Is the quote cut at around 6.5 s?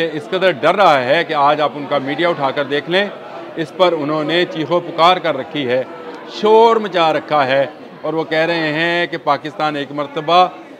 no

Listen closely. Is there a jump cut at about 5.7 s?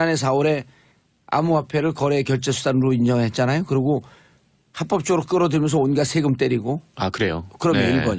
yes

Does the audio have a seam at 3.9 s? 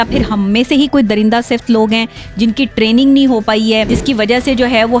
yes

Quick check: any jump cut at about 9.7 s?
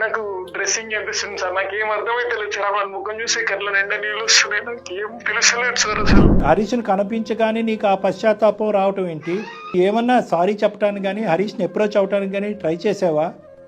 yes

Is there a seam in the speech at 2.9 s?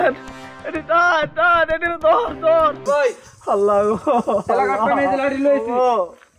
yes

